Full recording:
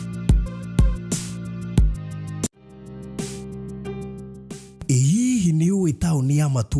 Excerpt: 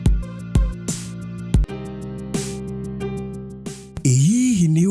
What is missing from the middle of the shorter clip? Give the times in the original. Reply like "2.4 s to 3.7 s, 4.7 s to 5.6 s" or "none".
2.0 s to 2.6 s